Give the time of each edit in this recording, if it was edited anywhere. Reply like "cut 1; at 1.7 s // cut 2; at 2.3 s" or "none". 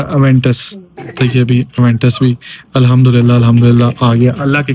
none